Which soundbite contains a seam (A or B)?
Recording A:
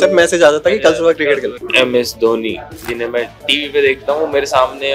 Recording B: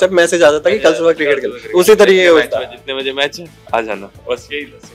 A